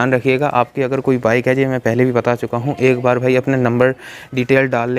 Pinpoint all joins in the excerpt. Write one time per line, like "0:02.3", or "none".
none